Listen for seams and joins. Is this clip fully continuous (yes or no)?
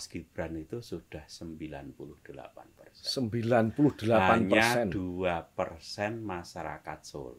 yes